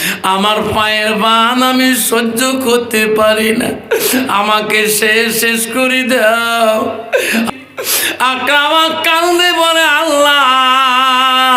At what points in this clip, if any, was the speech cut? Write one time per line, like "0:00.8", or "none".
0:07.5